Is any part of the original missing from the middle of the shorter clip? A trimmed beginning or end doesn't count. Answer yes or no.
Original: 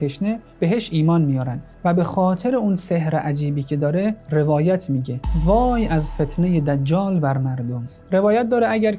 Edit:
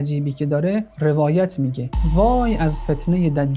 no